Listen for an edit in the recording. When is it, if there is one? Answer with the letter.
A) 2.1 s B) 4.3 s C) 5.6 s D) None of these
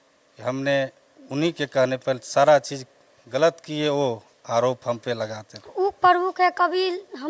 C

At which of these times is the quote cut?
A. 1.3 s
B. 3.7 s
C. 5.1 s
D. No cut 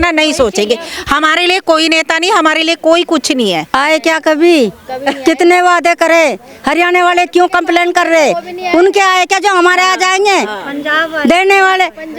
B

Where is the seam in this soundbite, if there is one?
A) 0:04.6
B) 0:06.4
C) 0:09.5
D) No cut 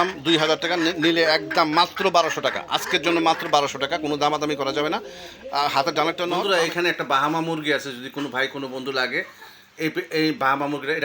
B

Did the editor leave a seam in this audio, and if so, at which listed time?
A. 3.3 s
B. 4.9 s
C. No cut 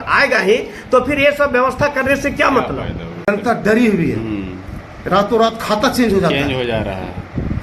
A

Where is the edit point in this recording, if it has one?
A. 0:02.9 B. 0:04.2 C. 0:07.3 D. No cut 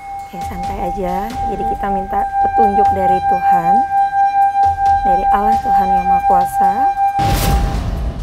C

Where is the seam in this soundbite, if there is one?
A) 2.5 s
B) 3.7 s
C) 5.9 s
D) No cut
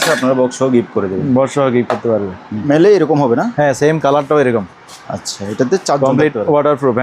A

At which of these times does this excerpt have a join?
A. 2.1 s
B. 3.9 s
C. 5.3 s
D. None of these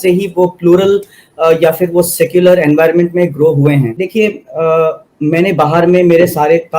B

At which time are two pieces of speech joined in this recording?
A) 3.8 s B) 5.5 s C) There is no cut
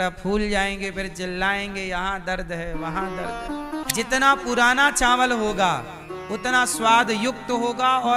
A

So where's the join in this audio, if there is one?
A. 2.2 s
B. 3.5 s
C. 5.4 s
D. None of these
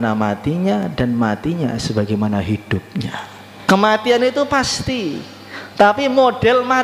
B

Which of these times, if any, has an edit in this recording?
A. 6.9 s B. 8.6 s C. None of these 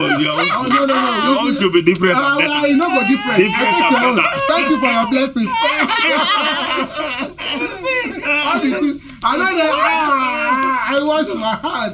C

